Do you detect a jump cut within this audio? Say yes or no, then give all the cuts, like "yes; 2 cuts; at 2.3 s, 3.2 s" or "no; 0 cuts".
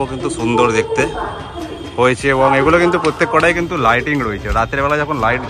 no; 0 cuts